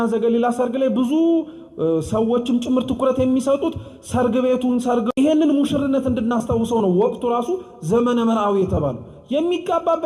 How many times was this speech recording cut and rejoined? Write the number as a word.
one